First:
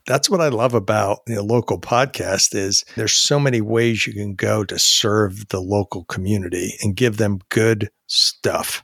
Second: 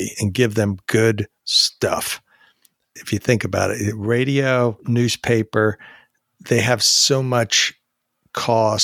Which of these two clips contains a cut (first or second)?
first